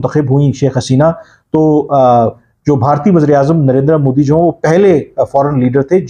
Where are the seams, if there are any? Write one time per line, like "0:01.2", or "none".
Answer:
none